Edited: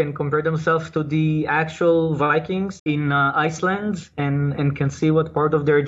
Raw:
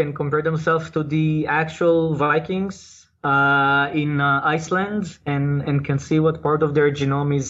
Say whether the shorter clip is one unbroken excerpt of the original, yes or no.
no